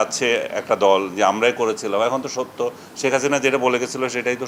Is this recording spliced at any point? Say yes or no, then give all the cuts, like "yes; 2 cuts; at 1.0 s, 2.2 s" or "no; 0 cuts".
no; 0 cuts